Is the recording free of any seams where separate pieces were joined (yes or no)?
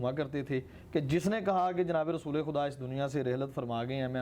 yes